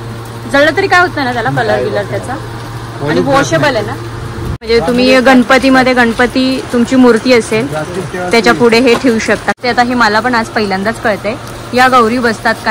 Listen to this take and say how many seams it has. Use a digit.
2